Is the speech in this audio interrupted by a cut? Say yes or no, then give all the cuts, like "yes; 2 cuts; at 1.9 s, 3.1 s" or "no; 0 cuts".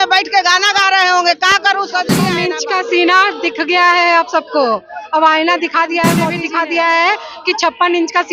yes; 2 cuts; at 2.4 s, 6.3 s